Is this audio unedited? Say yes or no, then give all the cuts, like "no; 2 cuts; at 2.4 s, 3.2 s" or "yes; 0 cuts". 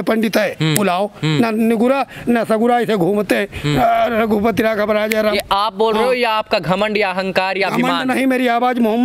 yes; 0 cuts